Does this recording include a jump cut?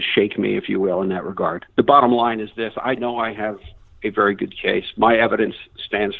yes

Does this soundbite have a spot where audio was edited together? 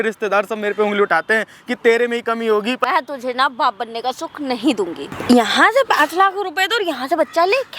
yes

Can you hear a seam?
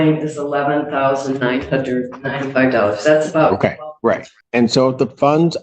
yes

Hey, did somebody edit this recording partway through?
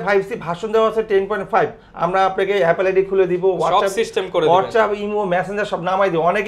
no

